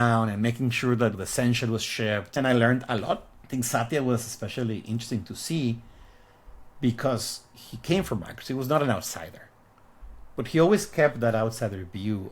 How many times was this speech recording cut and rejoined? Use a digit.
2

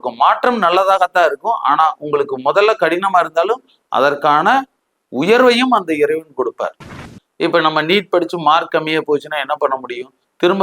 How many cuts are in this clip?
1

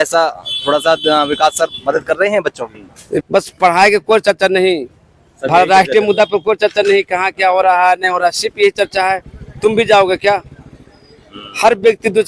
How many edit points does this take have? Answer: 1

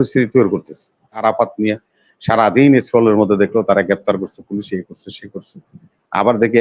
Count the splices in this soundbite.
1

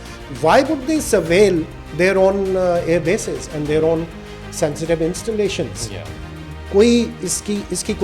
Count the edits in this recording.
1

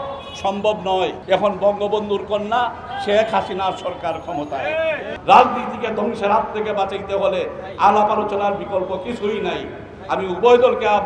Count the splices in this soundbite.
2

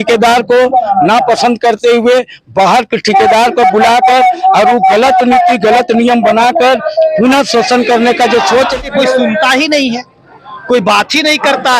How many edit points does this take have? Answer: 1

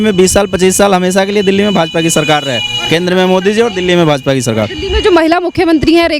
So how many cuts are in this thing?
0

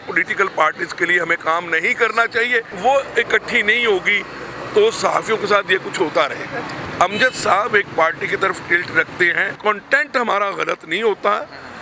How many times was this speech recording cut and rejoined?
3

